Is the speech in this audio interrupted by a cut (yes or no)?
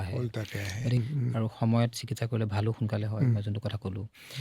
yes